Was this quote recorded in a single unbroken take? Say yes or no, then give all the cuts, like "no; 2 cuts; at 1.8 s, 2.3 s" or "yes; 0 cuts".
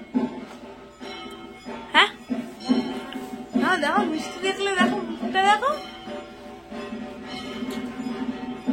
yes; 0 cuts